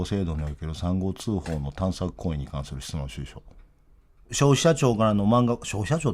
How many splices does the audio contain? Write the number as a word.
one